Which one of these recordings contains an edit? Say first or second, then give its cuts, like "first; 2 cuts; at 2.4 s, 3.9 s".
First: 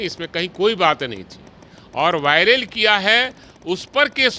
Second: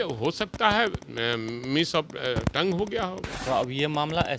second; 1 cut; at 3.3 s